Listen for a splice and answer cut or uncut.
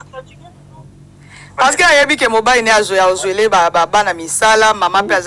uncut